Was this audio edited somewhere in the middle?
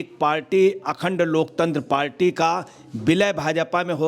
no; 0 cuts

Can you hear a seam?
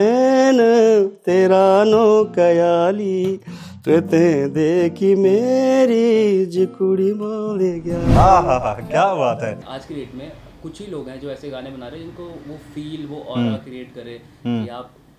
yes; 1 cut; at 9.7 s

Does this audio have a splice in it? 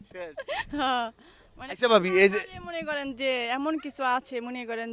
no; 0 cuts

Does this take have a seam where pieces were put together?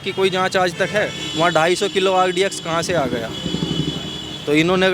yes; 1 cut; at 1.2 s

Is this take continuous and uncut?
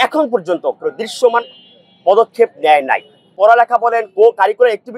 no; 1 cut; at 3.3 s

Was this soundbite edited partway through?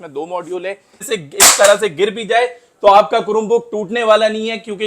yes; 1 cut; at 1.0 s

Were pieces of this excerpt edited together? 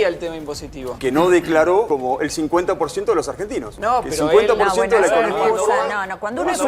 yes; 3 cuts; at 0.9 s, 1.9 s, 3.7 s

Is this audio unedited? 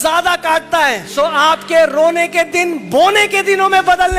no; 1 cut; at 1.0 s

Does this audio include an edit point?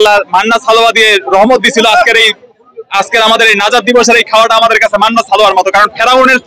no; 0 cuts

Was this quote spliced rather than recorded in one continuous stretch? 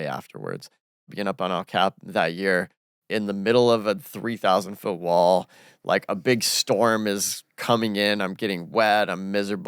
yes; 2 cuts; at 1.1 s, 2.9 s

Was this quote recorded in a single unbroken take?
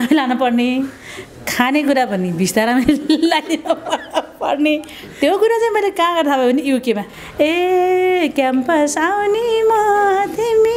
no; 1 cut; at 7.2 s

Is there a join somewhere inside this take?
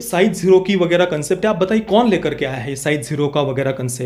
no; 0 cuts

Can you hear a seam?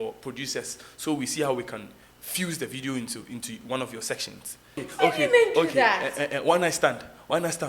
yes; 1 cut; at 4.8 s

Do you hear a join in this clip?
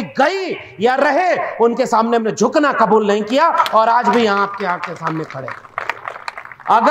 no; 0 cuts

